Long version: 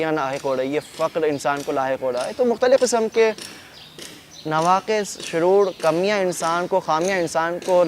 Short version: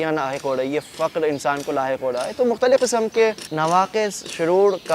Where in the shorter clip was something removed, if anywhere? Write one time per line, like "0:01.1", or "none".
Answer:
0:03.5